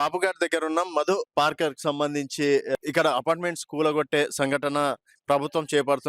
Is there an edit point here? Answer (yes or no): yes